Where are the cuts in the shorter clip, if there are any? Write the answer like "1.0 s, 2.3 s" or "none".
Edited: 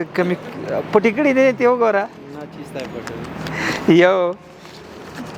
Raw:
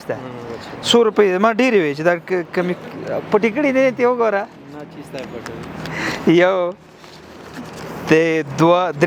none